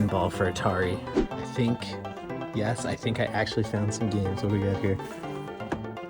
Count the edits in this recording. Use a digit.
1